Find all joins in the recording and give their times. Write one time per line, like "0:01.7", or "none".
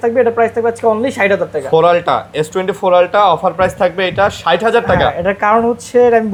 none